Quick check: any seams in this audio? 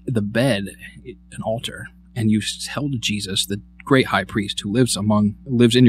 no; 0 cuts

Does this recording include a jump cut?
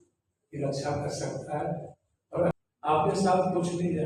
yes; 1 cut; at 2.5 s

